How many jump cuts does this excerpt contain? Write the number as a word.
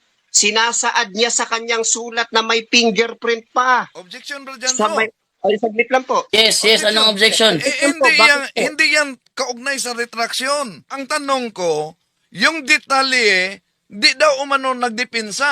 one